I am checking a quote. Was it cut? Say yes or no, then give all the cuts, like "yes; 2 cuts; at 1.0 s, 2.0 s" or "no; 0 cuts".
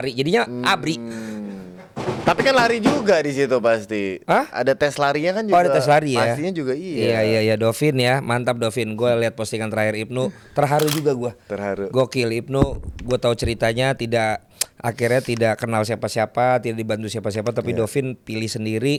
no; 0 cuts